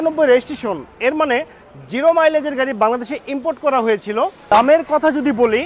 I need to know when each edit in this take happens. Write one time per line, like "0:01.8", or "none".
0:04.4